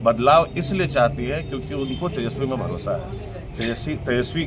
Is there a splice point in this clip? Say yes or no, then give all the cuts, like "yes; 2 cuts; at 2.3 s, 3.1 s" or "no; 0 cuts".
no; 0 cuts